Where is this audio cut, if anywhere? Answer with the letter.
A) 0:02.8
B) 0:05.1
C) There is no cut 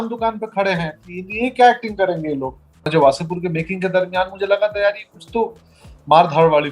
A